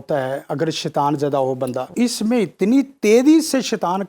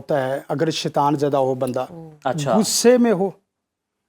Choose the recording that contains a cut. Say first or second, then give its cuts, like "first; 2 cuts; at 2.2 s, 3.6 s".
first; 1 cut; at 1.9 s